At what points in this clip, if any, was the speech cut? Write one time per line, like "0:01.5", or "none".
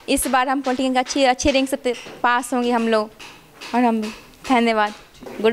none

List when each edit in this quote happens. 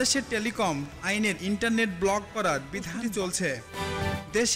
0:02.8

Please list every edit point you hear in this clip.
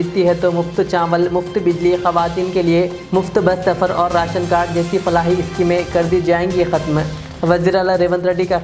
none

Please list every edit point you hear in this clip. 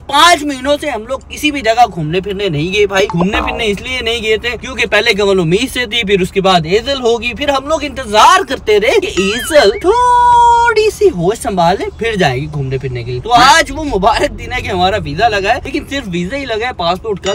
none

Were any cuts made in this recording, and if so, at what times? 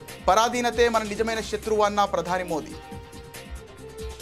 0:02.7

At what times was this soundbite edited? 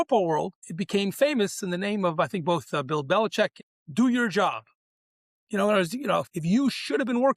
0:03.6
0:06.3

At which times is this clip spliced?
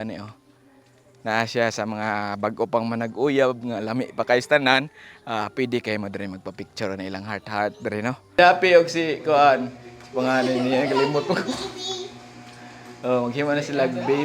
0:08.3

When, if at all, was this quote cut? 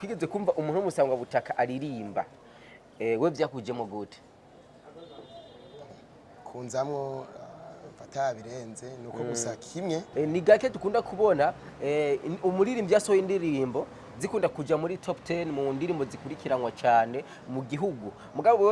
0:10.1

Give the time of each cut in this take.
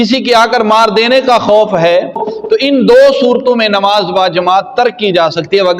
0:02.3

